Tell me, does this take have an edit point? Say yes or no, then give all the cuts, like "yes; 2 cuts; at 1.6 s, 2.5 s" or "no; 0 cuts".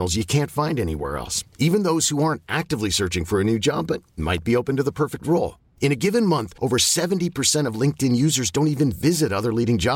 no; 0 cuts